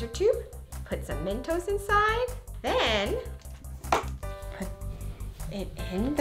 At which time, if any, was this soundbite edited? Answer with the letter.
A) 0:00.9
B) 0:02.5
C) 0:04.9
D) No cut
B